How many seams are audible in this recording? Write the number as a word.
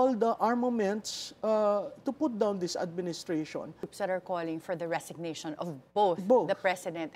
one